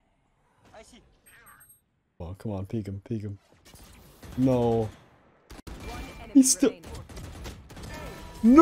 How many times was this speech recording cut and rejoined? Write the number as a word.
one